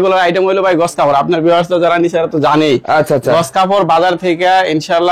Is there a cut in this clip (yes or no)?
no